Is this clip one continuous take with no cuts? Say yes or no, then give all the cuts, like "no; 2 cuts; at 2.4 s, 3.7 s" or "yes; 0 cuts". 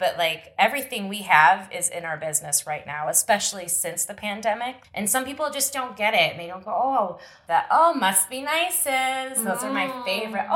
no; 1 cut; at 4.8 s